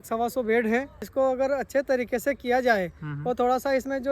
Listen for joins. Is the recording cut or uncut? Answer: cut